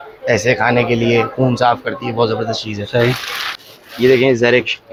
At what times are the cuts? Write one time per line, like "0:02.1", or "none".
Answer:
none